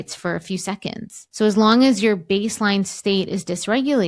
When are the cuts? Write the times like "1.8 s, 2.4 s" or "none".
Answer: 1.2 s

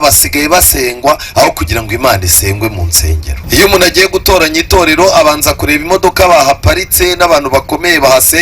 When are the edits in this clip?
3.3 s

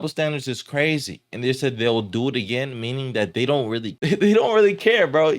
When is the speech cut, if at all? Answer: 3.9 s

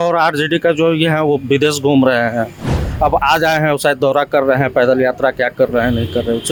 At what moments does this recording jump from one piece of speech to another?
none

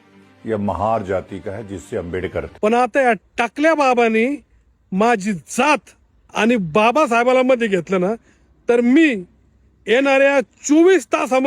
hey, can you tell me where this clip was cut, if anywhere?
2.5 s

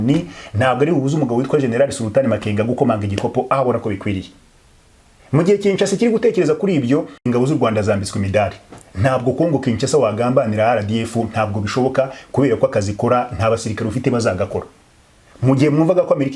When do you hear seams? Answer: 7.2 s

